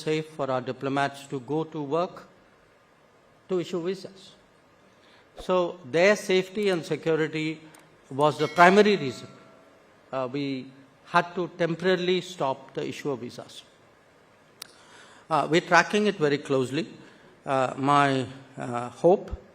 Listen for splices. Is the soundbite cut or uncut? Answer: uncut